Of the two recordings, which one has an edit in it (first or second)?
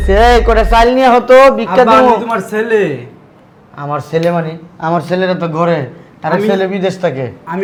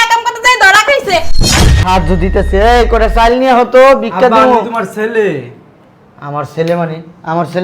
second